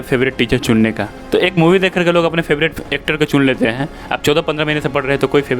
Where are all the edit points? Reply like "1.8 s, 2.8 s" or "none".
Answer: 1.1 s